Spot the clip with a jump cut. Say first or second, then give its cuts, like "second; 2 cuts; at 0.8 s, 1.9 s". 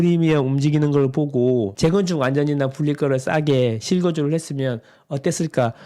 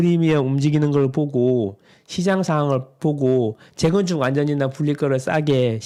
first; 1 cut; at 1.7 s